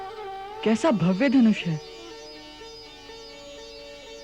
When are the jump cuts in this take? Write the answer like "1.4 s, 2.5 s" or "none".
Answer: none